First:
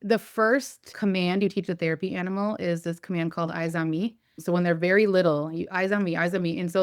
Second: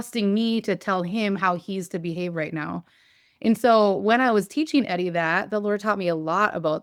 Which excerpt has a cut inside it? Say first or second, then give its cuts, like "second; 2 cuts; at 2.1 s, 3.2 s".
first; 2 cuts; at 0.9 s, 4.3 s